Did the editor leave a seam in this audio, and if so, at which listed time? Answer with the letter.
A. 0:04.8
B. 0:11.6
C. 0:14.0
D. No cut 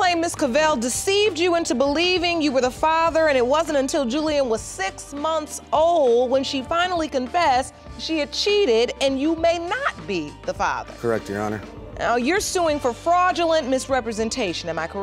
D